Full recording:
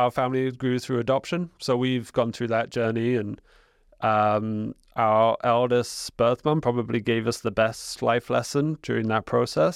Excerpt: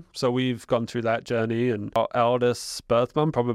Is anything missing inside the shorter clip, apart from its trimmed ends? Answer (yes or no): yes